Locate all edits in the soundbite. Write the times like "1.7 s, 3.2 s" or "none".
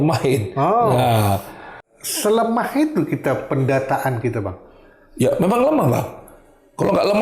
1.9 s